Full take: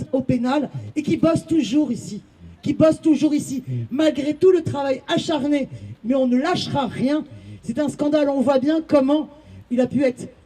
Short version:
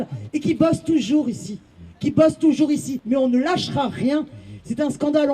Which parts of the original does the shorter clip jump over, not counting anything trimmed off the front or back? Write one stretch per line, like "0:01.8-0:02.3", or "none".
0:03.6-0:05.9

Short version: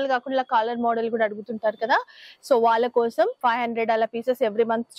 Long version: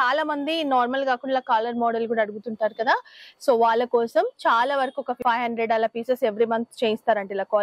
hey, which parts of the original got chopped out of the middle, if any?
0:04.3-0:05.2

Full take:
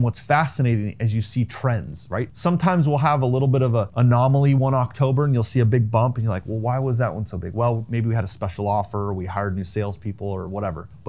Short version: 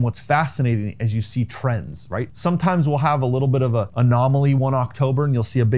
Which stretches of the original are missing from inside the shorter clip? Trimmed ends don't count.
none

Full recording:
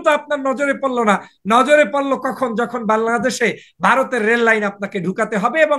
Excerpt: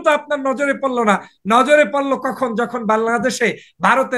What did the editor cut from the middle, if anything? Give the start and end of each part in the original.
none

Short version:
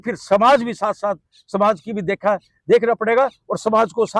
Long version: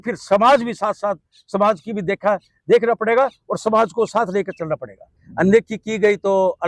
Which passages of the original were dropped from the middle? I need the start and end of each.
none

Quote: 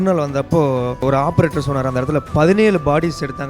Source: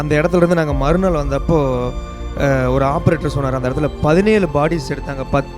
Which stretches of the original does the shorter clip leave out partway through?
0:02.0-0:02.7

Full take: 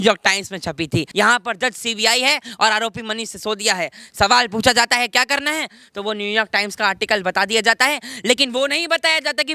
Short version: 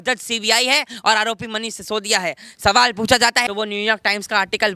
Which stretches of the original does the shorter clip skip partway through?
0:05.0-0:06.0

